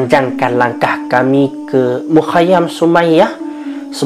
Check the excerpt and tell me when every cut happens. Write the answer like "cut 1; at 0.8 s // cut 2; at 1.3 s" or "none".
none

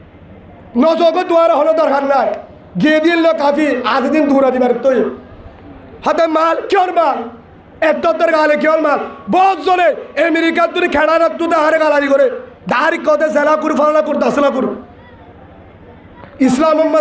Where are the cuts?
none

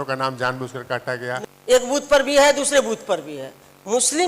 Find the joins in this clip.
cut 1; at 1.4 s

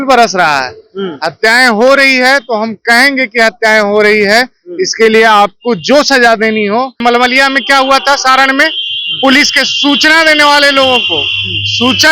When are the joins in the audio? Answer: cut 1; at 7.0 s

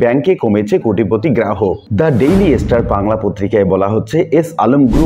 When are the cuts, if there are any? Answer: cut 1; at 1.8 s

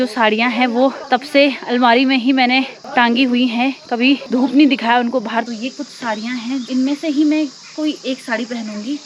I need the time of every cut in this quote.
cut 1; at 1.0 s // cut 2; at 2.8 s // cut 3; at 4.2 s // cut 4; at 5.5 s // cut 5; at 6.7 s

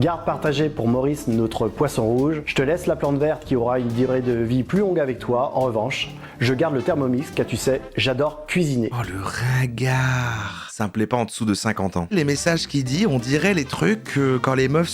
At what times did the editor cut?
cut 1; at 10.6 s // cut 2; at 12.1 s

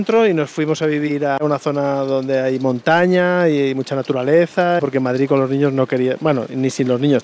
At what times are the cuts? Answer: cut 1; at 1.4 s // cut 2; at 4.8 s

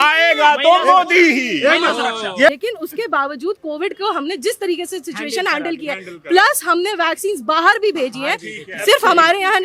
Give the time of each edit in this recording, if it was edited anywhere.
cut 1; at 2.6 s

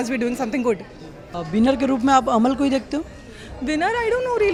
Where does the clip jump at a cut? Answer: none

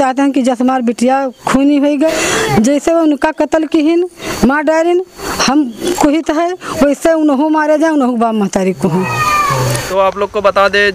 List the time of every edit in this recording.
cut 1; at 2.2 s // cut 2; at 9.9 s

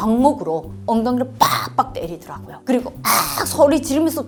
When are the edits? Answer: none

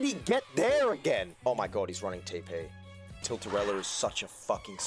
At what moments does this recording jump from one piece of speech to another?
cut 1; at 3.2 s

